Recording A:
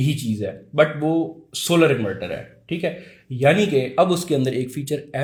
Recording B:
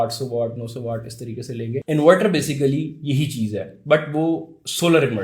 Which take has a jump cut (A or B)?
B